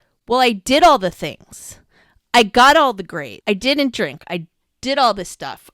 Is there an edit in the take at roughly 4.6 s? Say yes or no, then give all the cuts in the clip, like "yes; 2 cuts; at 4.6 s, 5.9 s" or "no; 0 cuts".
no; 1 cut; at 3.2 s